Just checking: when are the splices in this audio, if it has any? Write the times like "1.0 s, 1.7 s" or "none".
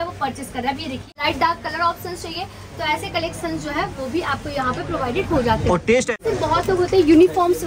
1.1 s, 6.2 s